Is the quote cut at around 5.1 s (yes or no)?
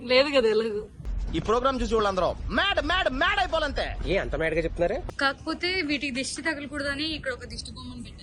yes